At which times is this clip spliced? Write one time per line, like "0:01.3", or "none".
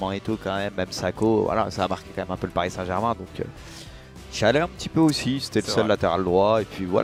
none